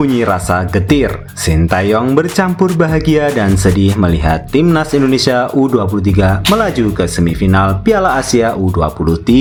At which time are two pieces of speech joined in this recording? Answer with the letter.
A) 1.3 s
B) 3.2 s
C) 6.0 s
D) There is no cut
D